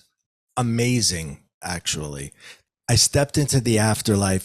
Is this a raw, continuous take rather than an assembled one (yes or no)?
no